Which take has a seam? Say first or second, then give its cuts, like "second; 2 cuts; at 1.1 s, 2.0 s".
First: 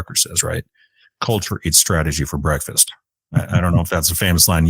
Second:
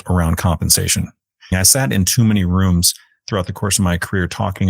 second; 1 cut; at 1.5 s